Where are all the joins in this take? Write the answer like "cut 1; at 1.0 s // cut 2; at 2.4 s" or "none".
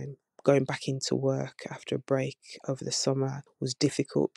cut 1; at 3.4 s